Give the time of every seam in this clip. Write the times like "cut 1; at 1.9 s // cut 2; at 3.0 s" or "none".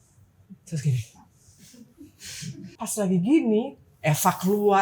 cut 1; at 2.7 s